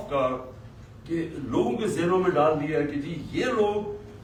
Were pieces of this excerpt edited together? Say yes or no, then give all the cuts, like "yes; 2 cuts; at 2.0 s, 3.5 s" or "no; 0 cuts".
no; 0 cuts